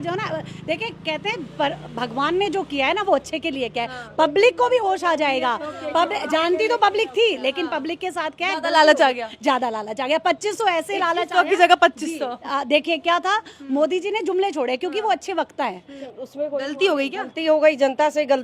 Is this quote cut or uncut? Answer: cut